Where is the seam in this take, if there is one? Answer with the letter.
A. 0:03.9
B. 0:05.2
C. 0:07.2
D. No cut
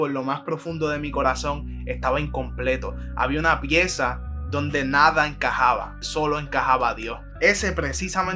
C